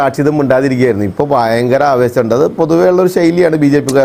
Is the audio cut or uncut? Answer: uncut